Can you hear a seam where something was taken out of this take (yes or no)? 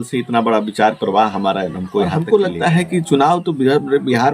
yes